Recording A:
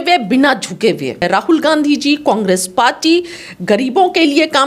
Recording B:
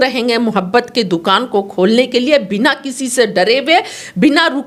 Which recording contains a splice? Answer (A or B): A